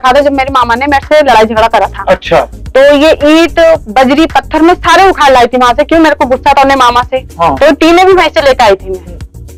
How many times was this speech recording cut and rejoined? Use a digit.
0